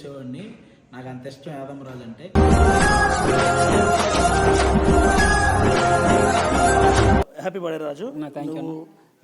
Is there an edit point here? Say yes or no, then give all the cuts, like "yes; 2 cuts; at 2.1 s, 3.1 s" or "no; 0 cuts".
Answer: yes; 1 cut; at 7.3 s